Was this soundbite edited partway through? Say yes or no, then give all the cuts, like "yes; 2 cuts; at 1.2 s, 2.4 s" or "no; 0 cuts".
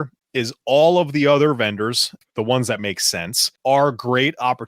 yes; 2 cuts; at 2.2 s, 3.5 s